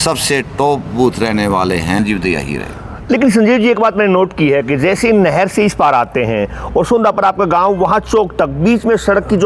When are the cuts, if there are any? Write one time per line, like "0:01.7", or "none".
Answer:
0:02.0